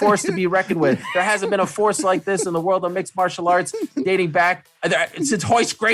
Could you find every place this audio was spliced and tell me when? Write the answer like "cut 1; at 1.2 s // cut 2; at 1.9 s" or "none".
none